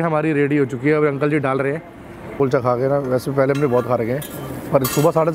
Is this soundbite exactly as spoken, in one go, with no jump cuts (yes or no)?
no